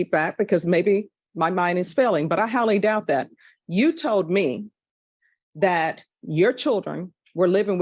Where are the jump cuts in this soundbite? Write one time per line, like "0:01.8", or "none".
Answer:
none